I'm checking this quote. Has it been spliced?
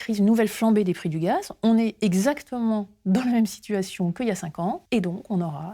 yes; 1 cut; at 4.8 s

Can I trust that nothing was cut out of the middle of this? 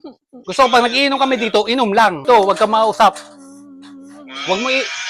no; 1 cut; at 2.2 s

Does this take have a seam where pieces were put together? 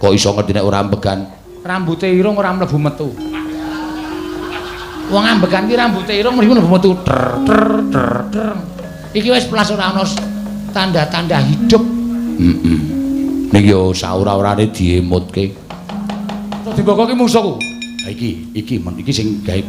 yes; 1 cut; at 16.7 s

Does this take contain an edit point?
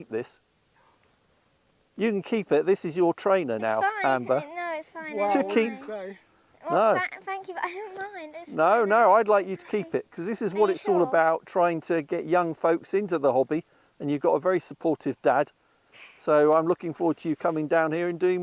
no; 0 cuts

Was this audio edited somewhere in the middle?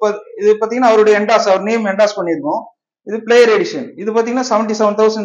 no; 0 cuts

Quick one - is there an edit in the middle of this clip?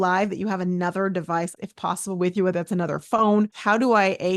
yes; 2 cuts; at 1.6 s, 3.5 s

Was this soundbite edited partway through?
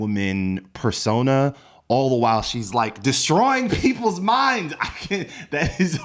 no; 0 cuts

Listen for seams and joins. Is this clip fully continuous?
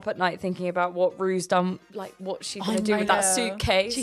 no; 1 cut; at 1.8 s

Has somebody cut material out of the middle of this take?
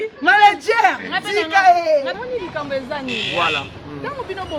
yes; 1 cut; at 2.2 s

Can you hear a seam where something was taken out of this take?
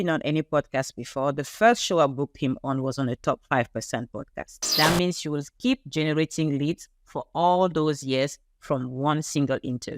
yes; 1 cut; at 4.7 s

